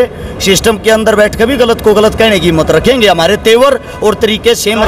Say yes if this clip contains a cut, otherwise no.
no